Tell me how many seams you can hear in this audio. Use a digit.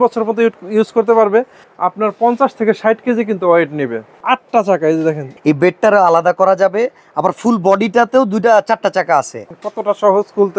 4